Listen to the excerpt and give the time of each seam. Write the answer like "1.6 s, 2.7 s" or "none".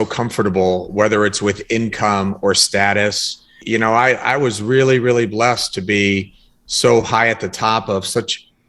3.6 s

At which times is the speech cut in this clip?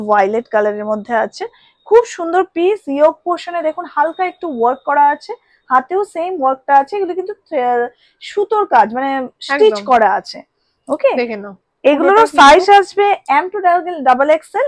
none

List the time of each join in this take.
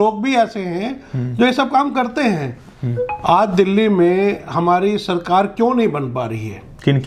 none

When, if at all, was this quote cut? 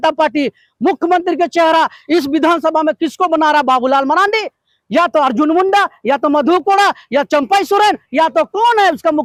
none

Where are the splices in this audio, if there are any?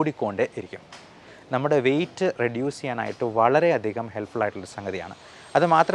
1.3 s

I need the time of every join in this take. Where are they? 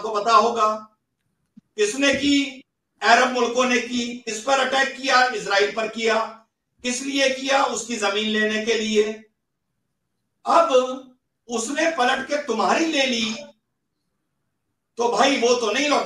none

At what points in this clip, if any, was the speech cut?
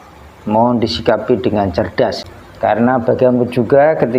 2.2 s

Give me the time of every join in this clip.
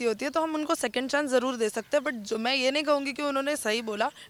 none

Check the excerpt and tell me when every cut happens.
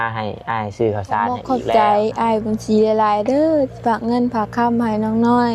1.5 s

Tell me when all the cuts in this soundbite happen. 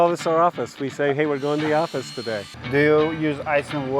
2.6 s

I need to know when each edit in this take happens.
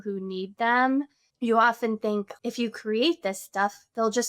1.2 s, 2.3 s

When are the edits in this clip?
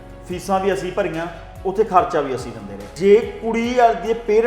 2.9 s

